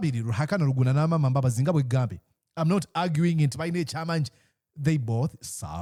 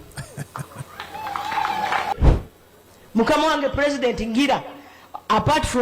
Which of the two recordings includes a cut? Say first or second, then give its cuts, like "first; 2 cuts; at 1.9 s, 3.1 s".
second; 1 cut; at 2.2 s